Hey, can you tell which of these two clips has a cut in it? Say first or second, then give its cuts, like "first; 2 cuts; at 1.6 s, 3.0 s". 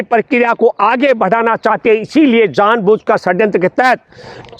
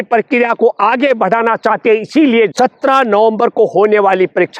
second; 1 cut; at 2.5 s